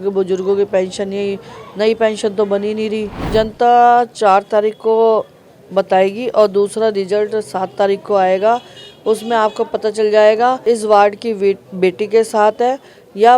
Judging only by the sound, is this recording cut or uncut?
cut